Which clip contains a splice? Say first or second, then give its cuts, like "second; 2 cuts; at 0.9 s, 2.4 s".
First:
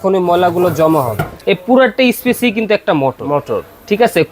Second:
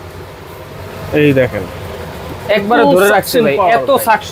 first; 1 cut; at 1.3 s